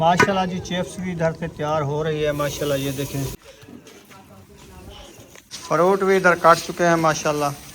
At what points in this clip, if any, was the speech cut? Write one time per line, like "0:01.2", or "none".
0:03.5
0:05.5